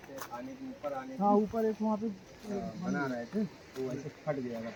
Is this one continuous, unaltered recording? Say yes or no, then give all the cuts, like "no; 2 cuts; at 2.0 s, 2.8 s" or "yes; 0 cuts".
yes; 0 cuts